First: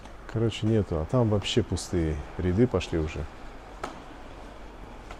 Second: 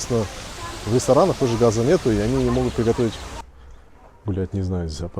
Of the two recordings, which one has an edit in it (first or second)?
second